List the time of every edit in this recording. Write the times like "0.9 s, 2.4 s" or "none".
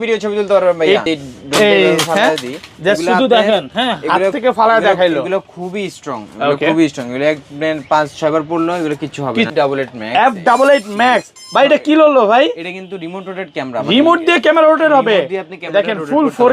1.0 s, 9.5 s